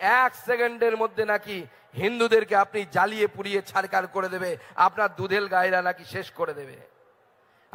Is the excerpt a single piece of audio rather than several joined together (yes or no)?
yes